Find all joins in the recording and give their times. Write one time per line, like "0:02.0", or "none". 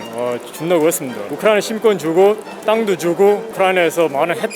0:01.2
0:03.5